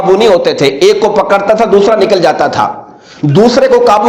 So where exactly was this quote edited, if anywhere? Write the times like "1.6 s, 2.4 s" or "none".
none